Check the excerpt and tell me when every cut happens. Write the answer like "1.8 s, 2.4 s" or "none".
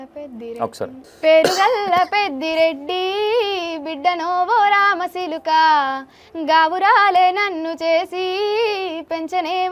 1.0 s